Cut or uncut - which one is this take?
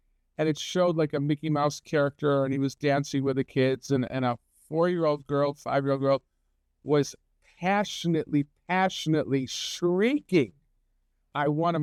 uncut